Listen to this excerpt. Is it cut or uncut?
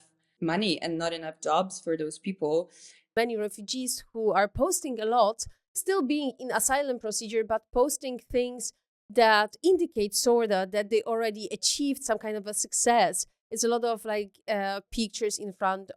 cut